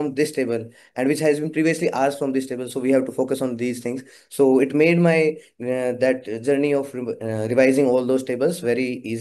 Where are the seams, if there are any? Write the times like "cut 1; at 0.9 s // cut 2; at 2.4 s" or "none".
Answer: none